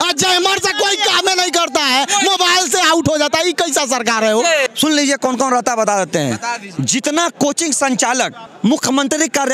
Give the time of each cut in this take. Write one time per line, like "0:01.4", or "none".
0:04.7
0:08.4

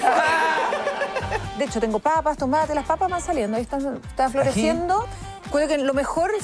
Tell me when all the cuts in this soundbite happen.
0:01.5
0:05.1

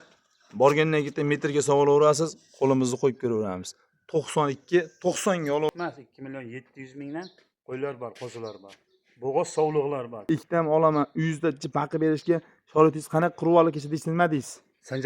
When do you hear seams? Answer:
0:05.7
0:10.2

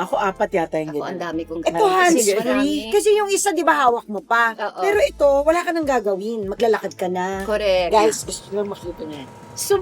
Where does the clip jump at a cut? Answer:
0:07.9

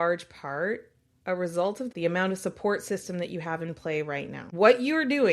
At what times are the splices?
0:01.9
0:04.4

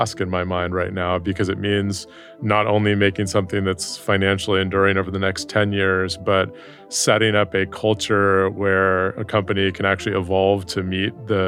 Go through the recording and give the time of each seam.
none

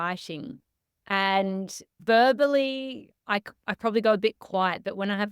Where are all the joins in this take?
0:01.9

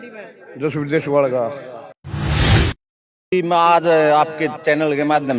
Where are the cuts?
0:02.0
0:03.3

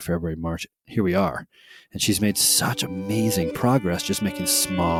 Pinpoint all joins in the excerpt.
none

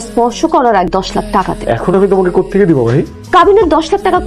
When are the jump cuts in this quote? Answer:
0:01.3

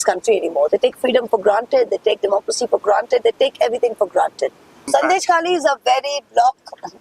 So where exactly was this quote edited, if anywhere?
0:04.9

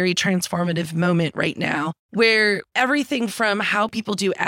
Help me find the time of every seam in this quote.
0:02.0
0:02.7

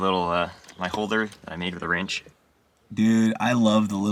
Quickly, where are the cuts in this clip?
none

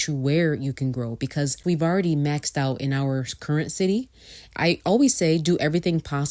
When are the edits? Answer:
0:01.6
0:04.5

